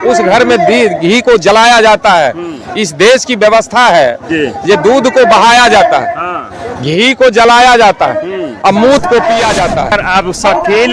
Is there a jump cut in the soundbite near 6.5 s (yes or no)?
no